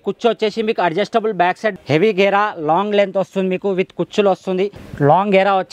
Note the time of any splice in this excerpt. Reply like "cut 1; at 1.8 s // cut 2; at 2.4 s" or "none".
cut 1; at 1.8 s // cut 2; at 4.8 s